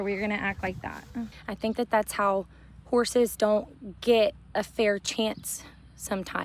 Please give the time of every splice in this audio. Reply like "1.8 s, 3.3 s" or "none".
1.4 s